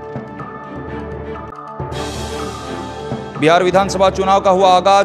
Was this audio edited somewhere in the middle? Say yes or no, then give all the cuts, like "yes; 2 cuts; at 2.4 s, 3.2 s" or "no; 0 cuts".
yes; 2 cuts; at 1.6 s, 3.3 s